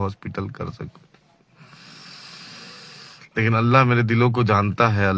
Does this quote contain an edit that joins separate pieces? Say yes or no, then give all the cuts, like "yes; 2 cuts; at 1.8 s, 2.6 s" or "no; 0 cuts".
no; 0 cuts